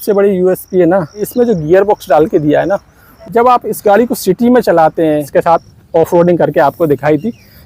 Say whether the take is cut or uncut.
cut